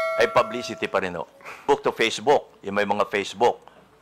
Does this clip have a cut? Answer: yes; 1 cut; at 1.6 s

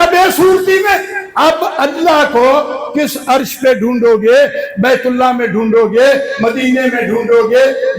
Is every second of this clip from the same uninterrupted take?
no; 1 cut; at 1.2 s

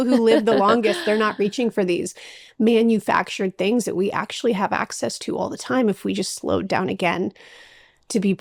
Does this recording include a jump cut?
no; 0 cuts

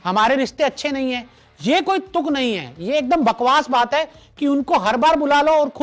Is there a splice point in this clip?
no; 0 cuts

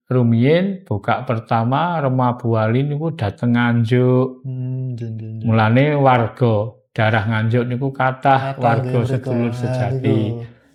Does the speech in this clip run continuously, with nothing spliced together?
yes; 0 cuts

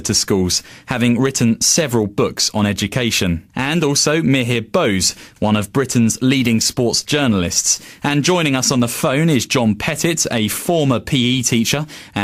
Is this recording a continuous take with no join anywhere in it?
yes; 0 cuts

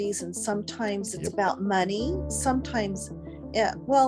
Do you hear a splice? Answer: no; 0 cuts

